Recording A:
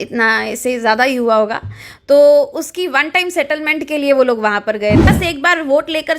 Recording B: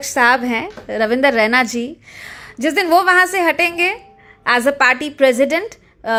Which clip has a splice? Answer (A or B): A